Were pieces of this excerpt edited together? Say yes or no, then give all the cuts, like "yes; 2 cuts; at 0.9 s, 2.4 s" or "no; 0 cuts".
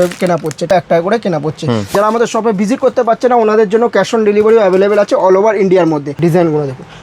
yes; 3 cuts; at 0.7 s, 1.9 s, 6.1 s